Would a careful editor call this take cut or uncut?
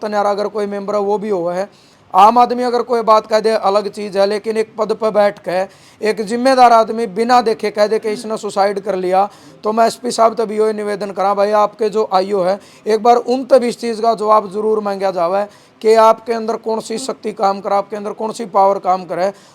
uncut